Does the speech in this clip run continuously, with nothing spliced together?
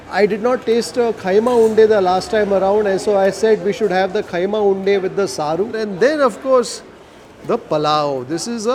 yes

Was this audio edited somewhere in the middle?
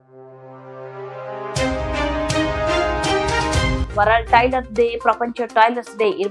yes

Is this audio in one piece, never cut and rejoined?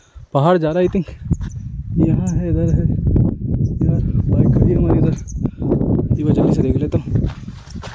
yes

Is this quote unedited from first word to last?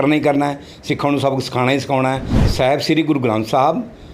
no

